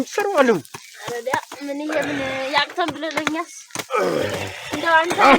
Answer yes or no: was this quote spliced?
no